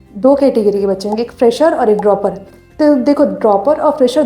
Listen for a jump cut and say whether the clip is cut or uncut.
uncut